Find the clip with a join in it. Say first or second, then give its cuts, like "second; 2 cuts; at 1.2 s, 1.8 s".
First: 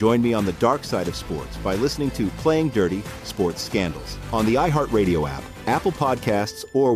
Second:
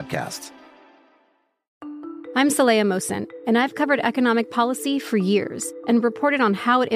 second; 1 cut; at 1.7 s